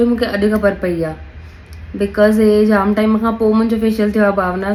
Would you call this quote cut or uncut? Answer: uncut